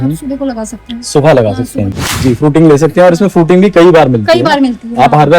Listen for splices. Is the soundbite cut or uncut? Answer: cut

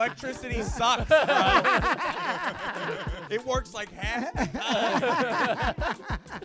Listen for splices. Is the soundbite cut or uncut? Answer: cut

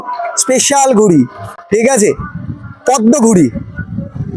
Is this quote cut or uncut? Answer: uncut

